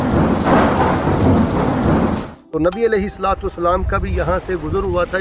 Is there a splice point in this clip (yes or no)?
yes